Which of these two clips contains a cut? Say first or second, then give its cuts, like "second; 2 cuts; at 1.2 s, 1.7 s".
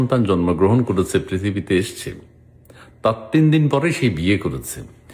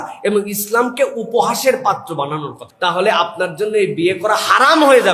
second; 1 cut; at 2.6 s